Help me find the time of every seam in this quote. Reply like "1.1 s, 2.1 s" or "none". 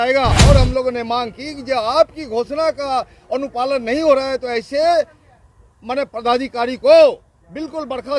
none